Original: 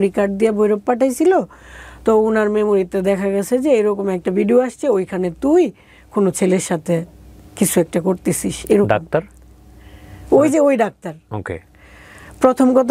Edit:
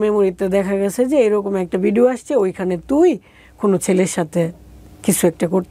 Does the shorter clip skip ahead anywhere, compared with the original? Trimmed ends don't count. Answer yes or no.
no